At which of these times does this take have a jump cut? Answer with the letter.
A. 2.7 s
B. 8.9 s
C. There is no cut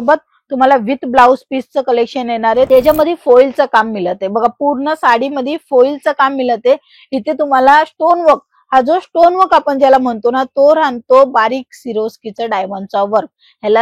A